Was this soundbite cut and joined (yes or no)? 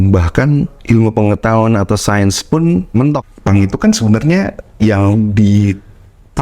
yes